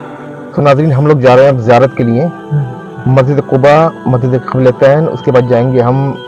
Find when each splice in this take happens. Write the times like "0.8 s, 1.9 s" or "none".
none